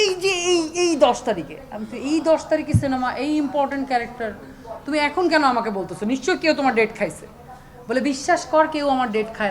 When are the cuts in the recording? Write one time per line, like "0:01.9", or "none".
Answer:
0:06.7